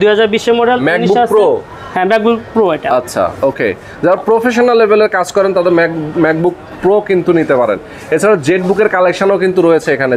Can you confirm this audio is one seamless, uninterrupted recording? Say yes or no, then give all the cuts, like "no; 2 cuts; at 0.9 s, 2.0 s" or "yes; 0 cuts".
yes; 0 cuts